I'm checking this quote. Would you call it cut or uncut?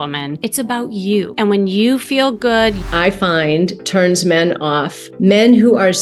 cut